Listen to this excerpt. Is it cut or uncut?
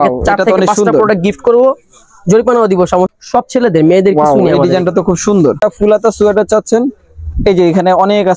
cut